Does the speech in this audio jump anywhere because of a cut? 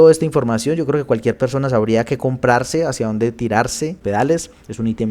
yes; 1 cut; at 4.0 s

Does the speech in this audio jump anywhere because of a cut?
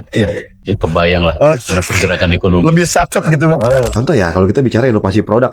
yes; 1 cut; at 3.9 s

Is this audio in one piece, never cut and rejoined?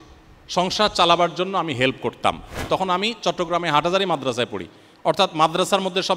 no; 1 cut; at 2.7 s

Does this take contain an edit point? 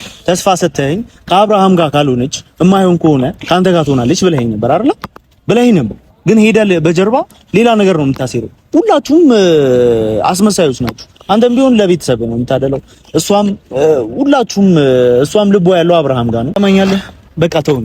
yes; 1 cut; at 16.5 s

